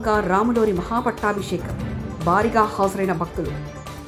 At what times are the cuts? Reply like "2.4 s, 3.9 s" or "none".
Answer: none